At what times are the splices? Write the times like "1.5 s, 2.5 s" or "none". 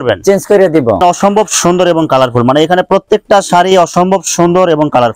1.0 s